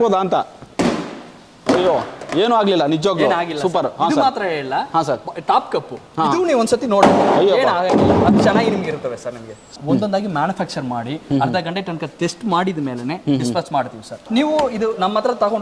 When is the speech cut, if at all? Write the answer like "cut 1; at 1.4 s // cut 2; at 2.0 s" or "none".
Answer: cut 1; at 9.8 s // cut 2; at 14.2 s